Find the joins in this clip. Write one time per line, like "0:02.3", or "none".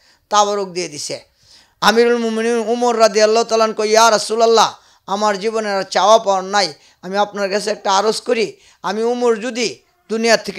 none